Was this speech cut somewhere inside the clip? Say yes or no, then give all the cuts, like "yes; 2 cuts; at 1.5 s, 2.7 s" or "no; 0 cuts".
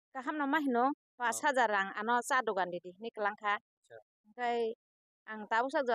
no; 0 cuts